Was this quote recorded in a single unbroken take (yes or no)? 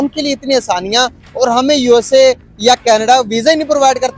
yes